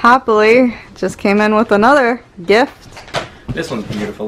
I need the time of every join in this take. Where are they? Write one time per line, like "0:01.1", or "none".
0:03.0